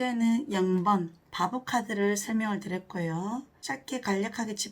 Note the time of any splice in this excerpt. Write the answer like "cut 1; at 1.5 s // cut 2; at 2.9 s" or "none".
cut 1; at 1.2 s // cut 2; at 3.5 s